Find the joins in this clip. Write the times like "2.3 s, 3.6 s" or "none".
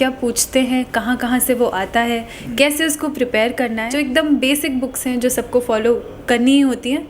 3.8 s